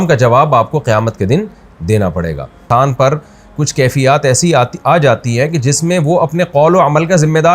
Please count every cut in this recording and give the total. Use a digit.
1